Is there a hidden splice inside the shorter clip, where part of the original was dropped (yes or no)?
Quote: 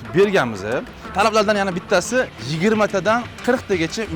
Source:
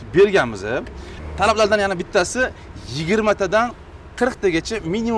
yes